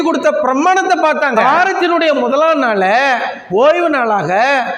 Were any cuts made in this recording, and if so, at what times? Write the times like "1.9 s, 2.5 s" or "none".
1.4 s

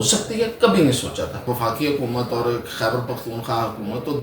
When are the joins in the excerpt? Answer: 1.5 s

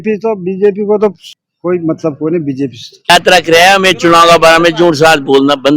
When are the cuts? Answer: 3.1 s

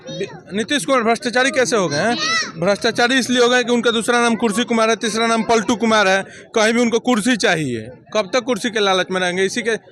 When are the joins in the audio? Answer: none

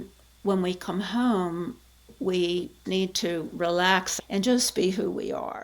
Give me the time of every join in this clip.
2.8 s, 4.1 s

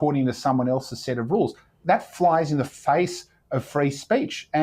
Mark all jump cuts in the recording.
1.8 s

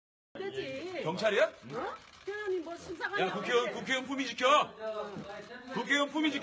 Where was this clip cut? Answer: 2.4 s

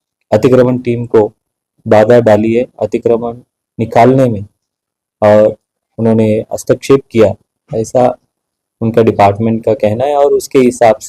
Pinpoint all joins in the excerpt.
none

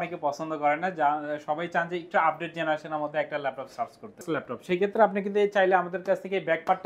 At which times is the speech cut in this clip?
4.2 s

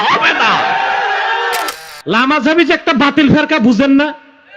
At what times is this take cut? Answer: 1.8 s

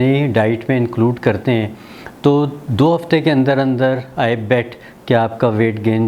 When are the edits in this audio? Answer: none

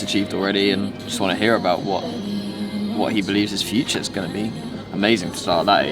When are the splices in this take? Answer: none

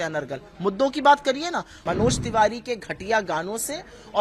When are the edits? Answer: 1.8 s

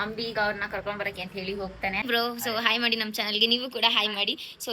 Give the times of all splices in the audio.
2.0 s

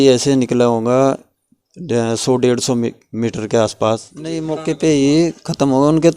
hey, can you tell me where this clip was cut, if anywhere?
4.5 s

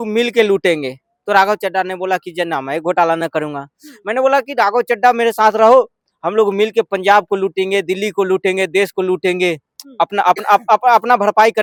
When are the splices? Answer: none

